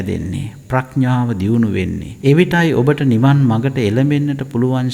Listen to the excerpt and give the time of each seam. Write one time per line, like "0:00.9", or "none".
0:02.1